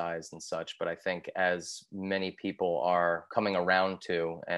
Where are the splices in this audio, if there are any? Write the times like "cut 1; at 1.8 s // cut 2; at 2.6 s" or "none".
cut 1; at 3.2 s